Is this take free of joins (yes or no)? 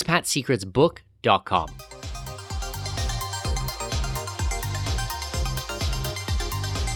no